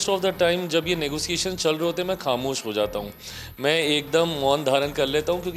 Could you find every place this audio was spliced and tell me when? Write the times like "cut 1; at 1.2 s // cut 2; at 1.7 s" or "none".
none

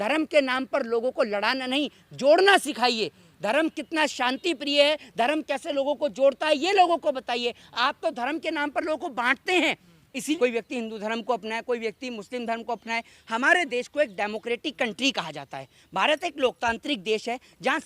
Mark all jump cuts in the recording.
cut 1; at 10.4 s

